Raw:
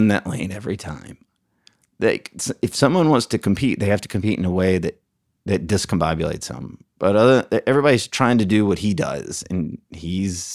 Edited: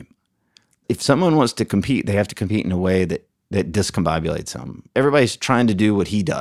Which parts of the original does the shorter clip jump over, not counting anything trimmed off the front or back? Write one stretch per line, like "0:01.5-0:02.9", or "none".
0:01.9-0:02.6
0:05.1-0:05.3
0:06.9-0:07.6